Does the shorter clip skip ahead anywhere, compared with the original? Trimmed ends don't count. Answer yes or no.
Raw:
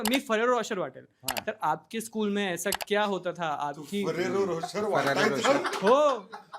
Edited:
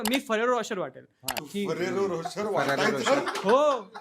yes